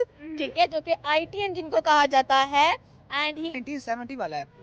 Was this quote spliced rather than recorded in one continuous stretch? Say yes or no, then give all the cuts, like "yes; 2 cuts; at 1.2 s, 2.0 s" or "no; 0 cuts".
yes; 1 cut; at 3.5 s